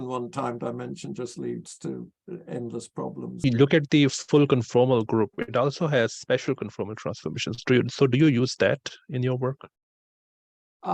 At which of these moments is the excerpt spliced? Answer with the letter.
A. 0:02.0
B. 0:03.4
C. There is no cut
B